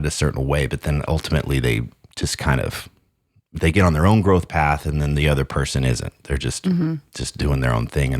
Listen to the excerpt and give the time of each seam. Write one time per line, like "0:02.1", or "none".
none